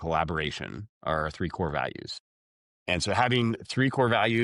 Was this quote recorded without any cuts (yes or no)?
yes